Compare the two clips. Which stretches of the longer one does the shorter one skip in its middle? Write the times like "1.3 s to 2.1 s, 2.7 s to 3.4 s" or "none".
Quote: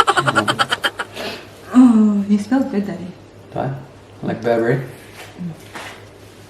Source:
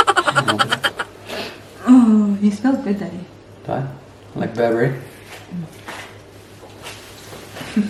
1.1 s to 1.2 s